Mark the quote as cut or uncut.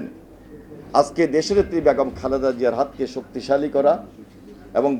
uncut